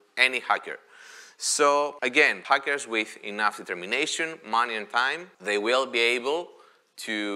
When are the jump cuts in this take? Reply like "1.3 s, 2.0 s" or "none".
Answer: 2.4 s, 5.3 s